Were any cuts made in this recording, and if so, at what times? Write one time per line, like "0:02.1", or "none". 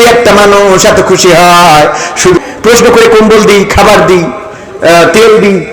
0:02.4